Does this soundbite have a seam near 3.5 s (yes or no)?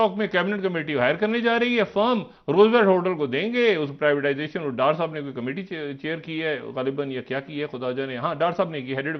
no